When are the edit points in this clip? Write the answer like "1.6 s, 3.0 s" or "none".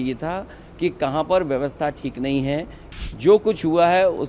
2.8 s